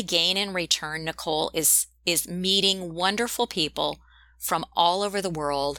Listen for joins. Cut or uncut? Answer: uncut